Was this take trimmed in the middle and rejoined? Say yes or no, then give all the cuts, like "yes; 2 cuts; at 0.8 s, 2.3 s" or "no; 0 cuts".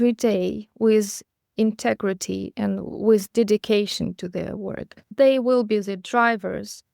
yes; 1 cut; at 5.1 s